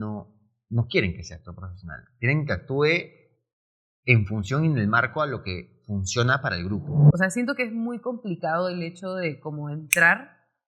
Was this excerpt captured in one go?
no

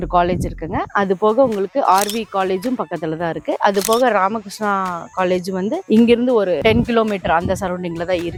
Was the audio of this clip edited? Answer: no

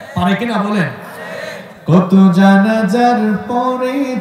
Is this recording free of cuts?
yes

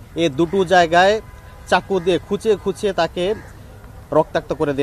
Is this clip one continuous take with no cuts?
yes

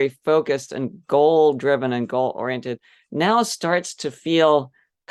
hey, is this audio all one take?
yes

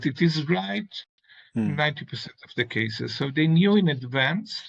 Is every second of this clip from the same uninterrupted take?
yes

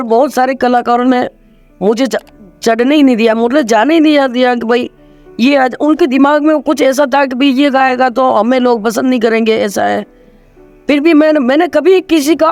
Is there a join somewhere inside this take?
no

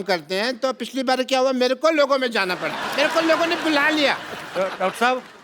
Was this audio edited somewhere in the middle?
yes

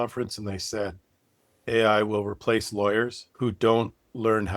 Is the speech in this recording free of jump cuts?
no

